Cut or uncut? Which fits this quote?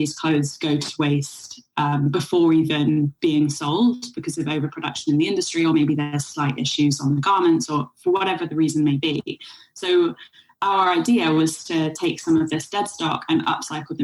uncut